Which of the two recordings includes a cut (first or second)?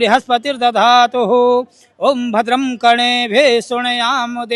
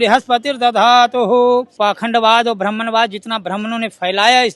second